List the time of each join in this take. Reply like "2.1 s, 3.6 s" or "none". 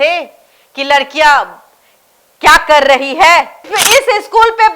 3.7 s